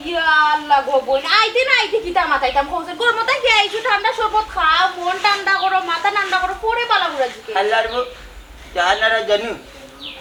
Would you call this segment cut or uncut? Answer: uncut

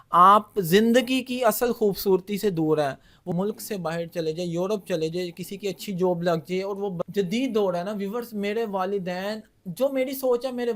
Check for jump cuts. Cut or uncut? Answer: cut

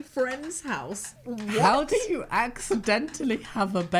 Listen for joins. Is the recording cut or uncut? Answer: cut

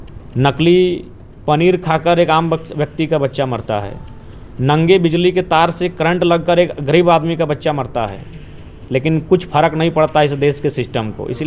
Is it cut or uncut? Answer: uncut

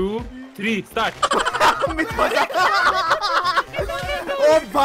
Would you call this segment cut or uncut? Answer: uncut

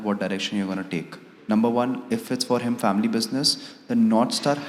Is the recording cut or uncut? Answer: uncut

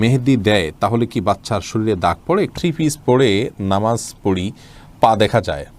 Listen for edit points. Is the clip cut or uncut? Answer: cut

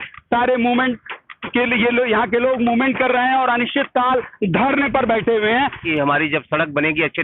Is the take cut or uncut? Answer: cut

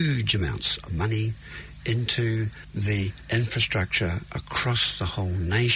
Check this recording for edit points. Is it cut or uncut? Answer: uncut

